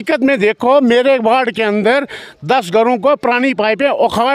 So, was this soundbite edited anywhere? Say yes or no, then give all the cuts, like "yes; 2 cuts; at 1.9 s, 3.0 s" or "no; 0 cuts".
no; 0 cuts